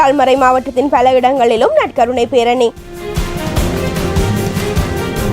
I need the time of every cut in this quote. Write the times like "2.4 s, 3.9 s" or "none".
2.9 s